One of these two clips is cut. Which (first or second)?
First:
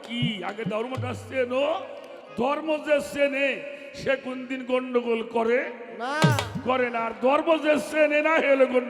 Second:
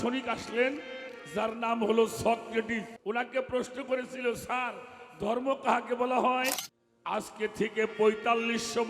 second